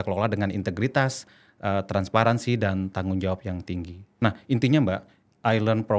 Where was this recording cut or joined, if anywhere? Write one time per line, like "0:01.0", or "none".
0:04.0